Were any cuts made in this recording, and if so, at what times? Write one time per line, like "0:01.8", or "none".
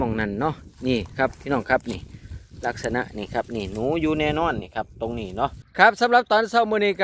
0:05.6